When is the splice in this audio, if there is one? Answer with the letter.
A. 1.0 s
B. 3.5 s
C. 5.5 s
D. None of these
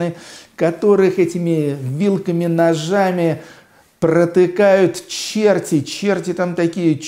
D